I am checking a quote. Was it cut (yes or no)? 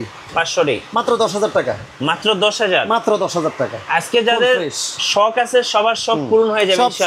no